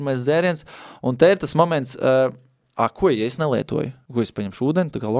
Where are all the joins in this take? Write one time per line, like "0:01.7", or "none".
0:04.0